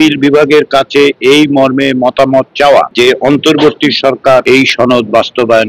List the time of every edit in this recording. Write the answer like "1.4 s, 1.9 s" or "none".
2.9 s, 4.4 s